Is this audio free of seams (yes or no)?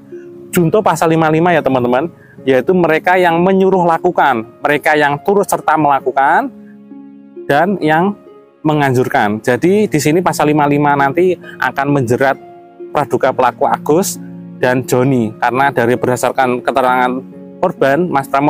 yes